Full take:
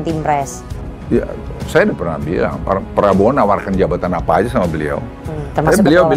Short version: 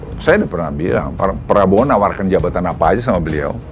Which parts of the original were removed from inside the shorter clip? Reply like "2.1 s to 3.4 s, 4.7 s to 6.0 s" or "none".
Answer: none